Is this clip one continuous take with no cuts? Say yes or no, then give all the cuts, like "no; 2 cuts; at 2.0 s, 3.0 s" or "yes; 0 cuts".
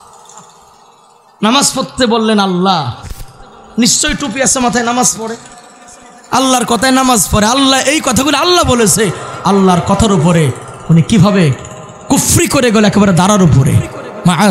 yes; 0 cuts